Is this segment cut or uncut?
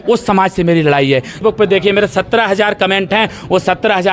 cut